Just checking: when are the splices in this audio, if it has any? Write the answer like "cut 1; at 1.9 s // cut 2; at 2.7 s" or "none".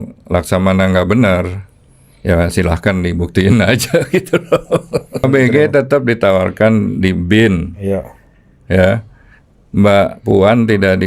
cut 1; at 5.2 s